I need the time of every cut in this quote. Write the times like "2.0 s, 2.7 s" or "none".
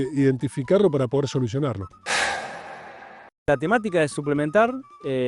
1.9 s, 3.5 s